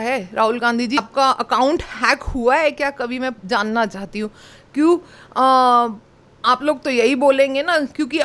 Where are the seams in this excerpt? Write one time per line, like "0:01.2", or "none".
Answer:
0:01.0

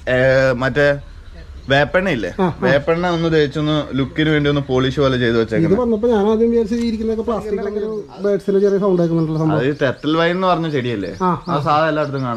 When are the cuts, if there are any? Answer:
0:07.8

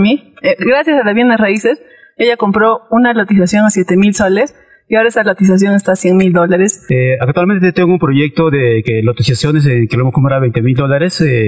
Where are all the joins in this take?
0:06.8

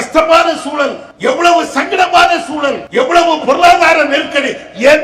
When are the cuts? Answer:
0:01.0
0:02.8

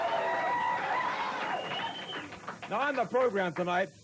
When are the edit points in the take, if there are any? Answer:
none

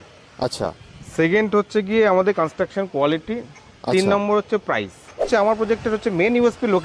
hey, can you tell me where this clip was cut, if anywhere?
0:05.3

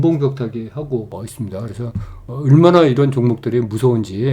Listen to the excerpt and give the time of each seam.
0:02.3

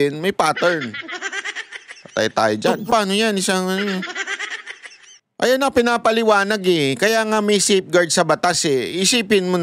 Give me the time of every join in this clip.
0:02.9

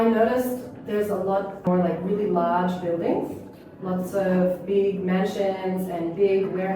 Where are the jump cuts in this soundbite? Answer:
0:01.7

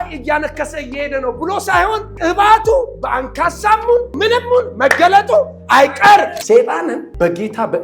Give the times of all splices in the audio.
0:02.1
0:04.1
0:06.7

